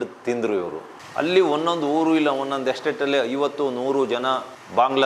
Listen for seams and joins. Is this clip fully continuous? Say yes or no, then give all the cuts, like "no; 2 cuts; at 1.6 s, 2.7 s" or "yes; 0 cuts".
no; 1 cut; at 1.0 s